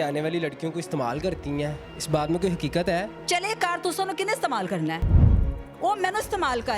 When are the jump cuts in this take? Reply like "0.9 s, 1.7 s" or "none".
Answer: 1.8 s, 3.2 s, 5.2 s